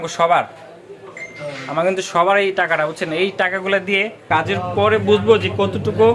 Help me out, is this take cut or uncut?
cut